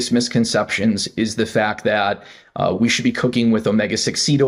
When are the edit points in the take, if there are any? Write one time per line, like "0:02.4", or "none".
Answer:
none